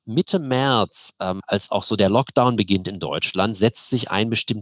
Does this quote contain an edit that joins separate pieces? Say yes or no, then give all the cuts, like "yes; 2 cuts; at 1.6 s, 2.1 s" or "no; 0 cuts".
yes; 1 cut; at 1.4 s